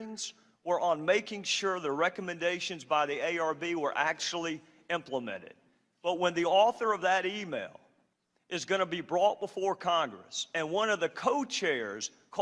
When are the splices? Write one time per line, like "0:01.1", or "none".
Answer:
0:07.1